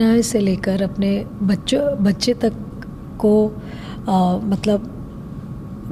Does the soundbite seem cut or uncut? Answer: uncut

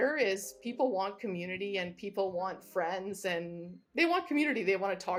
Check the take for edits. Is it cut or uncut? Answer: uncut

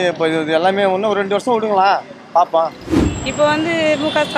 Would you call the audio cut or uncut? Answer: cut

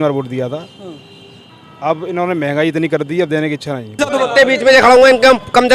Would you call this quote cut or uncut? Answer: cut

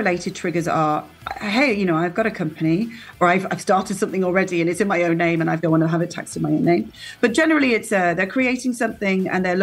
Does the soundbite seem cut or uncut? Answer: cut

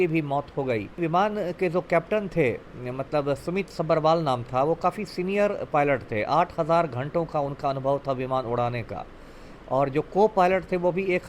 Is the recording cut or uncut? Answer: cut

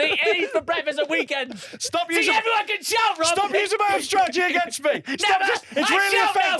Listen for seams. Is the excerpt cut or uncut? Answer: cut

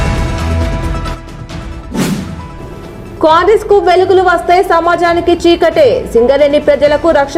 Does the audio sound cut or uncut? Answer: uncut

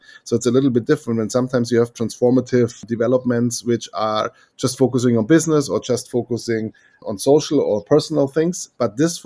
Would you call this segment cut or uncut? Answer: cut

